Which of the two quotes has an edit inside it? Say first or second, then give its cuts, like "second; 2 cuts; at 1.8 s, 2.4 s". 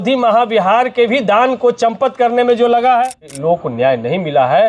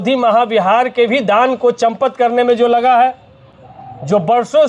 first; 1 cut; at 3.4 s